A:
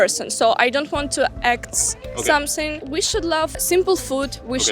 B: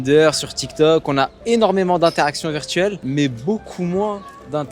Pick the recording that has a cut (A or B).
A